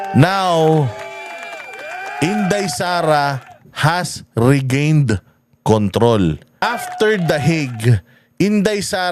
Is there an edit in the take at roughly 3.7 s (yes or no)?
no